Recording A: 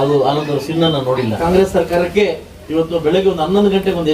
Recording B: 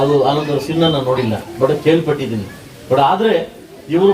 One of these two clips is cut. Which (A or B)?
A